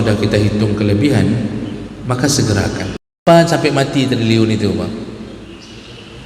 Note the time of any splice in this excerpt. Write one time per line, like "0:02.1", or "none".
0:03.2